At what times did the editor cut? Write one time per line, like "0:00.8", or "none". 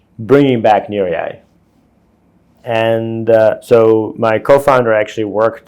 0:02.6

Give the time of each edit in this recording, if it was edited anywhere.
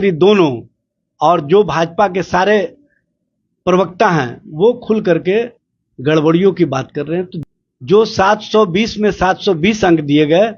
0:07.4

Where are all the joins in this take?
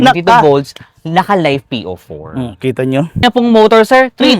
0:03.2

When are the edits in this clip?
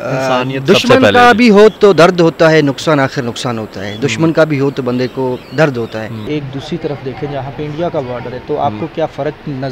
0:06.3

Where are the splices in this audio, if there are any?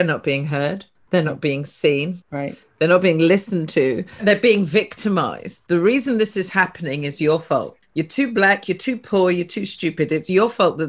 0:00.9
0:02.2
0:04.2
0:07.8

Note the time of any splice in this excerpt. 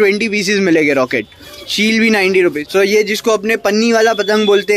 0:01.4
0:02.6

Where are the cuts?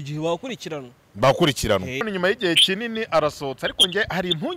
0:02.1

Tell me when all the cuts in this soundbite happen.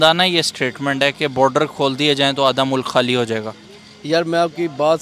none

